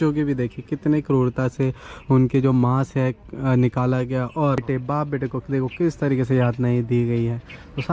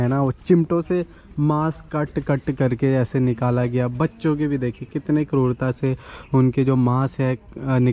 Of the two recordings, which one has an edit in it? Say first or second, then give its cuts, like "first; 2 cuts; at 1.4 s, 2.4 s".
first; 1 cut; at 4.6 s